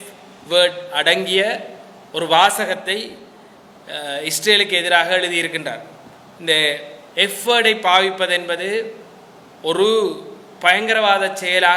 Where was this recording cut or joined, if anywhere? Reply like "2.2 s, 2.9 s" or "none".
none

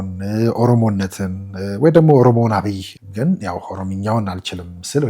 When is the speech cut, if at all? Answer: 3.0 s

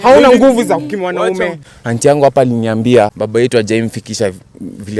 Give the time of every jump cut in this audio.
1.7 s, 3.2 s

